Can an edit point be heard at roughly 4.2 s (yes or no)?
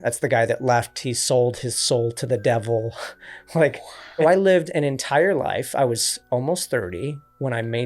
yes